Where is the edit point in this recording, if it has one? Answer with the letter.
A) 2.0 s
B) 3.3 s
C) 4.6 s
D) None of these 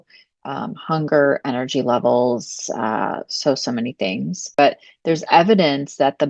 C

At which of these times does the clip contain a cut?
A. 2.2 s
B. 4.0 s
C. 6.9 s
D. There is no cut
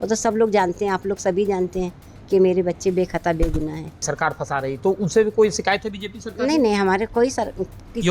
B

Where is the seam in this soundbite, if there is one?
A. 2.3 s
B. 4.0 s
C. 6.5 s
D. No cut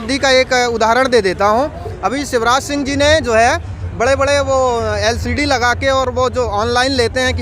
D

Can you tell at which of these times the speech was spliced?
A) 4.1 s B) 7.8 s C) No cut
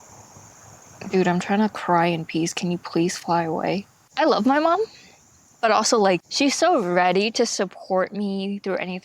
A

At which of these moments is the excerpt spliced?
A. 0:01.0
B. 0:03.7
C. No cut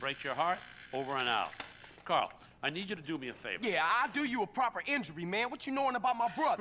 B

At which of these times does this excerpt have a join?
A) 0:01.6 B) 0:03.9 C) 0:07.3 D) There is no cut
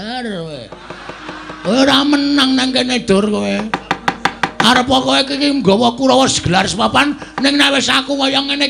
D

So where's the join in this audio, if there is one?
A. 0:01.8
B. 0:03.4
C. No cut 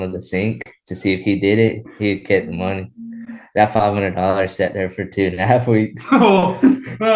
C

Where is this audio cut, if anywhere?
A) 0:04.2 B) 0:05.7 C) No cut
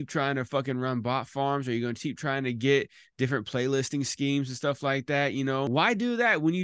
B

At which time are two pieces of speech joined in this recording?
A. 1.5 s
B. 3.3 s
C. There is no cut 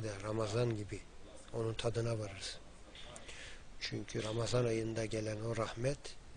B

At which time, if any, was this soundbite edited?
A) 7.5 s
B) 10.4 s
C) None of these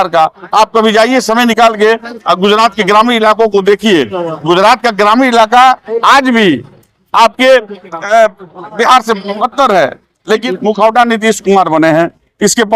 B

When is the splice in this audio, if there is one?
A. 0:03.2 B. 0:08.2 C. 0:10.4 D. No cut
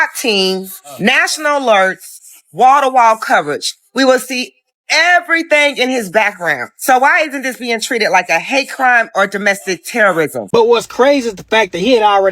C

